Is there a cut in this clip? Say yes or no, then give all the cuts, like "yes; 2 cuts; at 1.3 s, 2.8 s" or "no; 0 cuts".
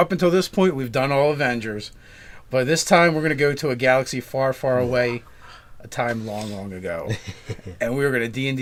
no; 0 cuts